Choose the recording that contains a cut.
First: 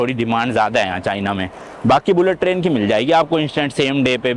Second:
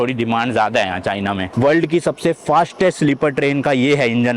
second; 1 cut; at 1.5 s

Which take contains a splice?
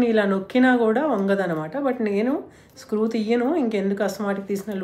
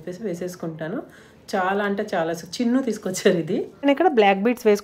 second; 1 cut; at 3.7 s

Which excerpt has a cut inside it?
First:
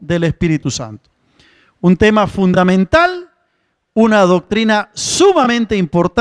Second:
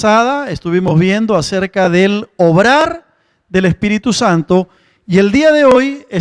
first; 1 cut; at 3.0 s

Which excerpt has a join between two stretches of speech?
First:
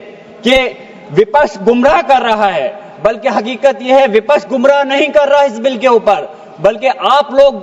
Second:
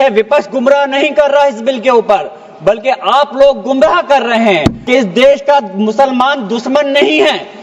second; 1 cut; at 4.8 s

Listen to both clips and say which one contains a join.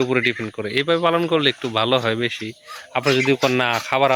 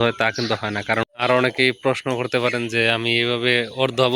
second; 1 cut; at 1.0 s

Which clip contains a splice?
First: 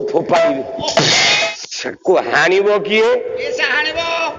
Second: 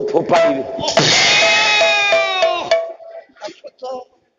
first; 1 cut; at 1.5 s

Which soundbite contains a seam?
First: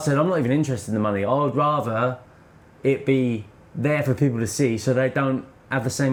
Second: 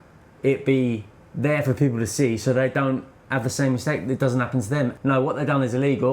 second; 1 cut; at 5.0 s

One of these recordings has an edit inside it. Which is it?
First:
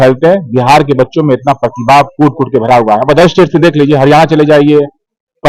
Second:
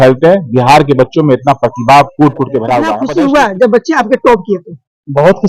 second; 1 cut; at 3.0 s

